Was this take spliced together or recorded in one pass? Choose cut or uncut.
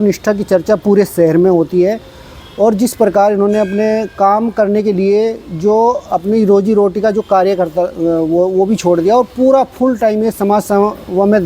uncut